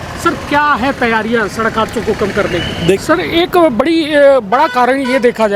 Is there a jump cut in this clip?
yes; 1 cut; at 3.0 s

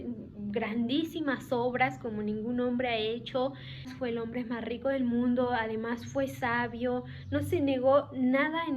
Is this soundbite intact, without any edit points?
no; 1 cut; at 3.9 s

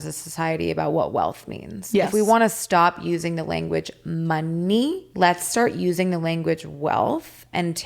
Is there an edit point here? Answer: yes; 1 cut; at 5.1 s

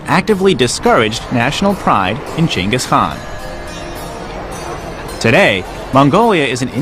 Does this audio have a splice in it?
no; 0 cuts

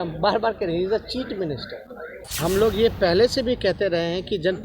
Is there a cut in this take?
yes; 1 cut; at 2.2 s

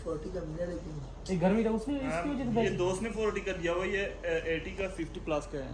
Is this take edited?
no; 0 cuts

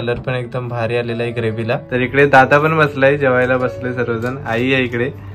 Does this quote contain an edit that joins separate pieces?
yes; 1 cut; at 1.8 s

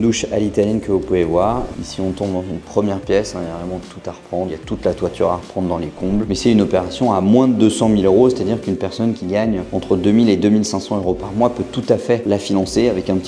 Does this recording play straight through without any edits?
no; 4 cuts; at 1.7 s, 4.5 s, 6.3 s, 12.2 s

